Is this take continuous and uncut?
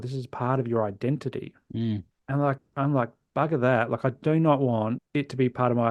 no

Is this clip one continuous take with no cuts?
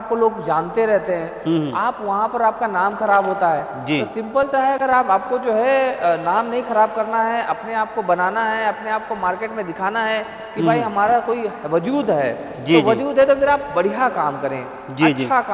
yes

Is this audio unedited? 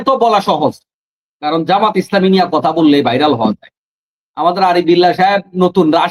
yes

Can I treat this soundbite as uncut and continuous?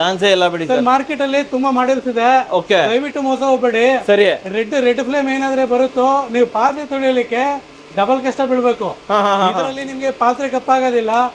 yes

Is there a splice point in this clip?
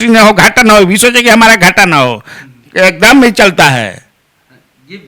no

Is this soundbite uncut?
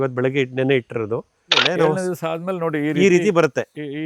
no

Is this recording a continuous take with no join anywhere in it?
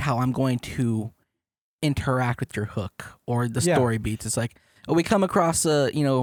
yes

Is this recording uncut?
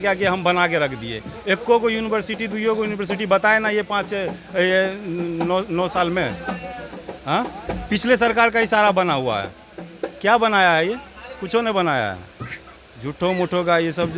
yes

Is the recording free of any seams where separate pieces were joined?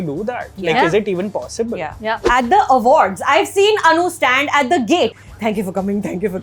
no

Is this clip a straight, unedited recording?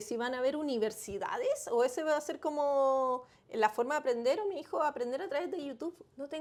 yes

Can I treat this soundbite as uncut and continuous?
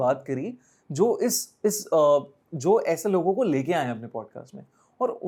yes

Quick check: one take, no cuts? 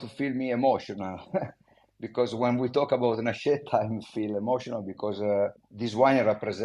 no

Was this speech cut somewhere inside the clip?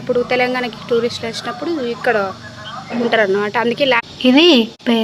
yes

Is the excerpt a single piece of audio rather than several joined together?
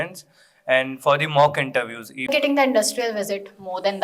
no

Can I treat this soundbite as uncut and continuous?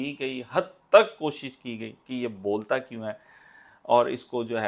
yes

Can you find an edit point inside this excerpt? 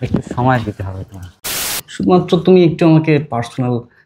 yes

